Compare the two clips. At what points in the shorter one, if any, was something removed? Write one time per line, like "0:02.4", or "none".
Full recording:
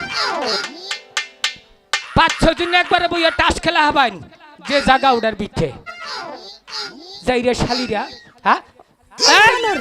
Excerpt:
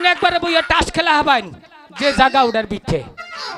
none